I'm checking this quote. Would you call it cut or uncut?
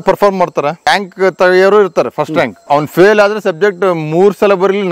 cut